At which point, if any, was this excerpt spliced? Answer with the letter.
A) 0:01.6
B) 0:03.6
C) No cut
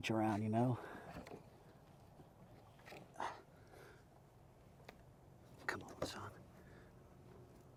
C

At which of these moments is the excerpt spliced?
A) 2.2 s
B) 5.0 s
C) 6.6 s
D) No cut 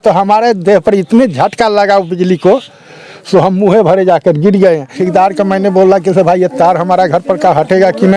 B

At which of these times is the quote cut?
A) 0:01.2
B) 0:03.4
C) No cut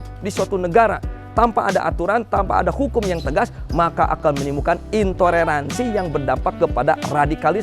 C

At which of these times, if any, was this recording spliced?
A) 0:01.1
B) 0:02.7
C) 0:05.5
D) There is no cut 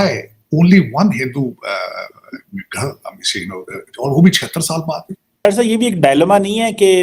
C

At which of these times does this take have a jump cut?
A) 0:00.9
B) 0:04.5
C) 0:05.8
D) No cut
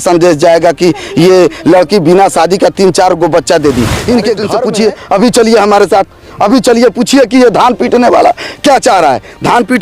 B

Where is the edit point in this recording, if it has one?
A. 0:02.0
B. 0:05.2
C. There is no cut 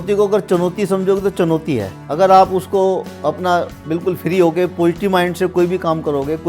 A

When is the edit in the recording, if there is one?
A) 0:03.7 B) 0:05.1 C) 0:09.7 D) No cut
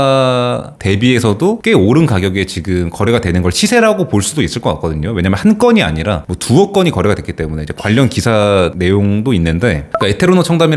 D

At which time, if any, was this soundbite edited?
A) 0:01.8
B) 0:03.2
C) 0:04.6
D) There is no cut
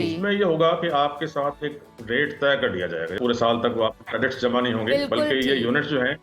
B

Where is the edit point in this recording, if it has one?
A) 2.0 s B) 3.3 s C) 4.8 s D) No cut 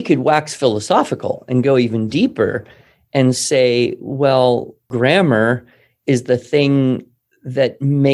C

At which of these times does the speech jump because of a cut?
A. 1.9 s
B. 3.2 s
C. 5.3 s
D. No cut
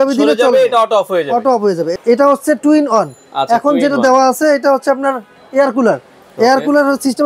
A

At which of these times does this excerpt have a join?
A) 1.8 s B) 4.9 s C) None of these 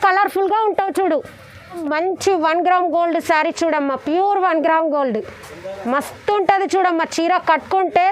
A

